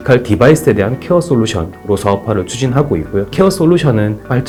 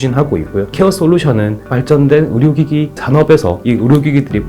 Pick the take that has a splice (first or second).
second